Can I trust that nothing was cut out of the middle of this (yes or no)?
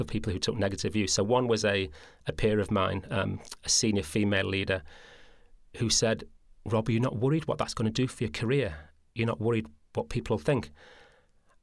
yes